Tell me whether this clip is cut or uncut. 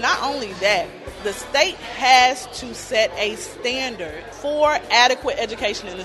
cut